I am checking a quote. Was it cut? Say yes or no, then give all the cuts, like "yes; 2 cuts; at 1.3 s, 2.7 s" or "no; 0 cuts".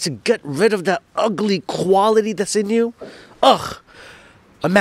no; 0 cuts